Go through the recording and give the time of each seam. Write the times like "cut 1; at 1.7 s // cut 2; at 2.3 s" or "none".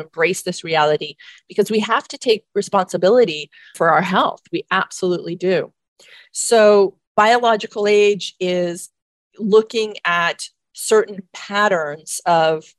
none